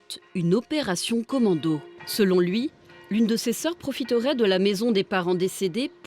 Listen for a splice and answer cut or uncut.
cut